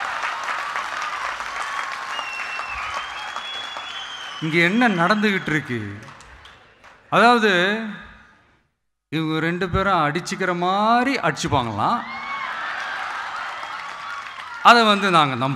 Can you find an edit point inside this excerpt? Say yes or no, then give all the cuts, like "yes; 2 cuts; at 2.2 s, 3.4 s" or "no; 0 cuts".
no; 0 cuts